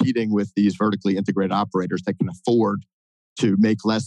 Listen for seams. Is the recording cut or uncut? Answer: uncut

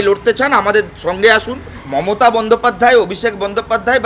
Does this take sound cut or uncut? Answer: cut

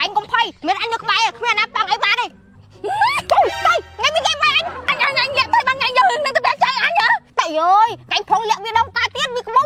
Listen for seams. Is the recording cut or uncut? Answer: uncut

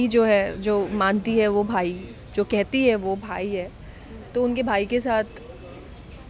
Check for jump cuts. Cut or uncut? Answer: uncut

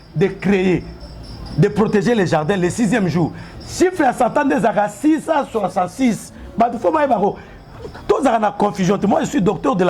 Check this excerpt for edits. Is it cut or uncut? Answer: uncut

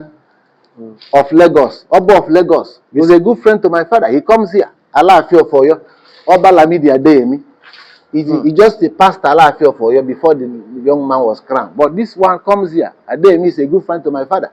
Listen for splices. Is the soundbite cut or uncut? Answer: cut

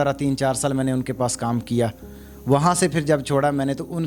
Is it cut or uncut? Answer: uncut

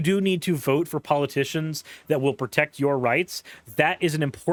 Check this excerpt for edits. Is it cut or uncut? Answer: uncut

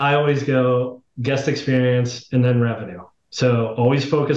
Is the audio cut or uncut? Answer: uncut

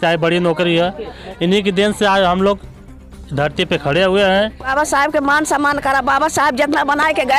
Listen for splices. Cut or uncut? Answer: cut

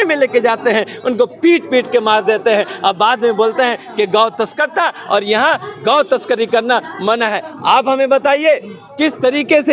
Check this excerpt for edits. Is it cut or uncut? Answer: uncut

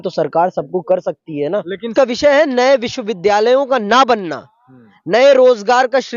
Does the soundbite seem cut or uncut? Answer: cut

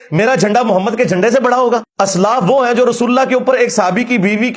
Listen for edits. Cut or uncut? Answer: cut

